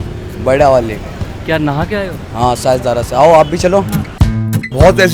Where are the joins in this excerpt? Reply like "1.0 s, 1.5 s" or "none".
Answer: 4.1 s